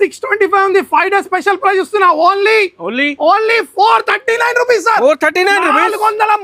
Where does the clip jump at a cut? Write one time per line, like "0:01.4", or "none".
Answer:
none